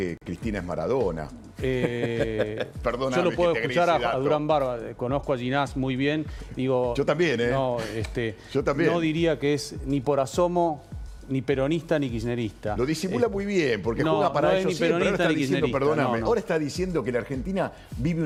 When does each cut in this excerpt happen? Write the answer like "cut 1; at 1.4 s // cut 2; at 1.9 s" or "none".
none